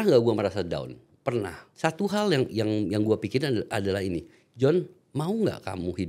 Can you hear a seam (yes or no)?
yes